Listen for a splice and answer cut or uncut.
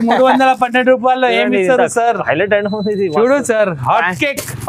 uncut